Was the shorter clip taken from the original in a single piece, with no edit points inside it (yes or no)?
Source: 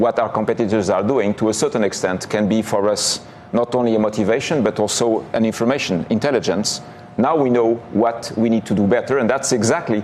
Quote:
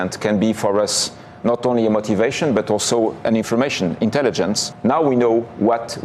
no